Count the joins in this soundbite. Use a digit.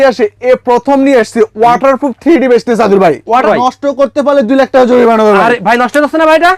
1